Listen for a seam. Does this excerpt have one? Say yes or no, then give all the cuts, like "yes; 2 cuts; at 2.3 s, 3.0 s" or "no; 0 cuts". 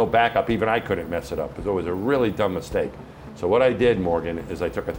no; 0 cuts